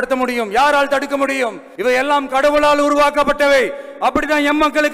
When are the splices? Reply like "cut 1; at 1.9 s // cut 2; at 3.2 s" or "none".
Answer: cut 1; at 1.6 s